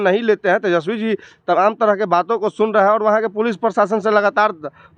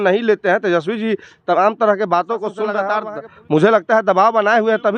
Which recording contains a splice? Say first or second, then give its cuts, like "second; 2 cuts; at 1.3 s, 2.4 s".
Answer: second; 1 cut; at 2.9 s